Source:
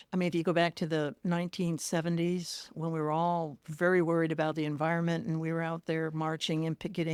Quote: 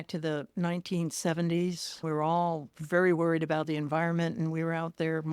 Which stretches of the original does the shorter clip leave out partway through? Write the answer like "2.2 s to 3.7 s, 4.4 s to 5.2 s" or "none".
2.6 s to 2.8 s